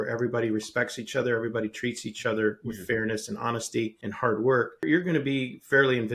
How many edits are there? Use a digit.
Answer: 2